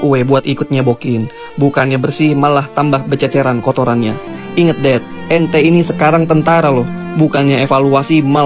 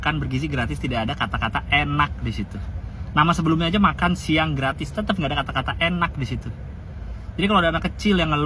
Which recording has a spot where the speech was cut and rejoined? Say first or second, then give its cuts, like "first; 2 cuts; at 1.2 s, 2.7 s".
first; 1 cut; at 4.3 s